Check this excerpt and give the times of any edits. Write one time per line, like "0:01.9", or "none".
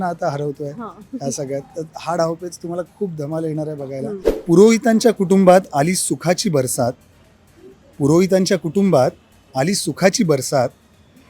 0:04.3